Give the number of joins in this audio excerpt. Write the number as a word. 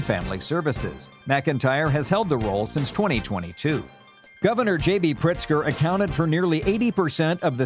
one